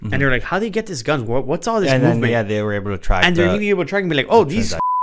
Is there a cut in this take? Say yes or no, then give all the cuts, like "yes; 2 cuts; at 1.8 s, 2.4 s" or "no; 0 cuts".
no; 0 cuts